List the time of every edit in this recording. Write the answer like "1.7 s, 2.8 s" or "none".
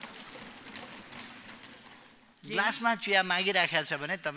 2.2 s